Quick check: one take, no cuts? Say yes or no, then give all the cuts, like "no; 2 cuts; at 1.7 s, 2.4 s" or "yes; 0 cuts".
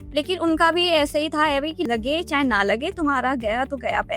no; 1 cut; at 1.9 s